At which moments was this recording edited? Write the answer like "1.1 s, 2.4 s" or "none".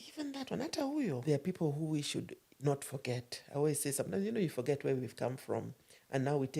1.2 s